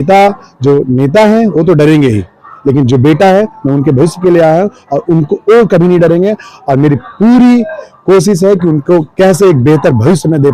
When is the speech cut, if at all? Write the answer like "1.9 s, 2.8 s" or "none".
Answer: none